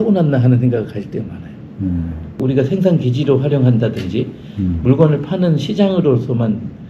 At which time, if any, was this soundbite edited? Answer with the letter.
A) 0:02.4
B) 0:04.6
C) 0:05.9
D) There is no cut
A